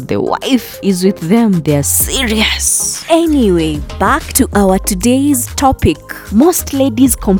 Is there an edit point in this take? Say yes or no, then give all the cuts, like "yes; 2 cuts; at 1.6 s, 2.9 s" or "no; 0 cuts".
no; 0 cuts